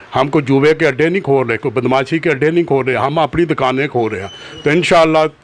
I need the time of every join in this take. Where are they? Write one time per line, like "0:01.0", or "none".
none